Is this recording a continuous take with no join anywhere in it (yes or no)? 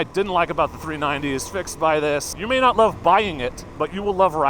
no